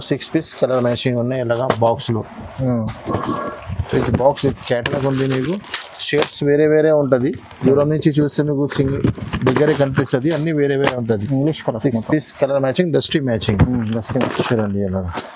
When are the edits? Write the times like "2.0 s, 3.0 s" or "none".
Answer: none